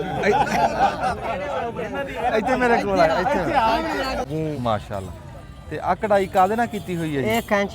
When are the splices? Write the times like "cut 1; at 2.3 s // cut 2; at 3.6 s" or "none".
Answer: cut 1; at 4.2 s